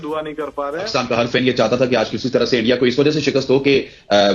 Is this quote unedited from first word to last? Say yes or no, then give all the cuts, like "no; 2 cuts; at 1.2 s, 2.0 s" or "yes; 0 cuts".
no; 1 cut; at 1.3 s